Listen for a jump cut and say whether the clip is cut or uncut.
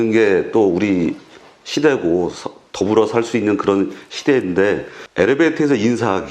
cut